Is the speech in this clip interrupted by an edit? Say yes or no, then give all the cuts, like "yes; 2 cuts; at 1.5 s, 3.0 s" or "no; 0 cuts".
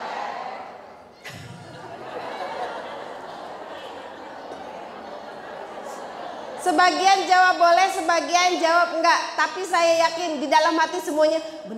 no; 0 cuts